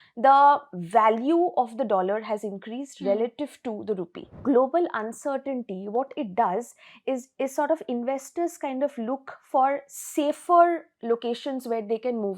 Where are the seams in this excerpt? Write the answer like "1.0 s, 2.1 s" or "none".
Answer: 4.3 s